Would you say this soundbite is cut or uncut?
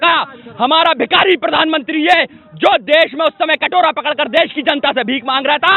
uncut